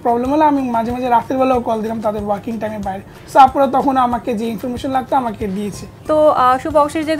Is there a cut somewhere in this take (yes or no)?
yes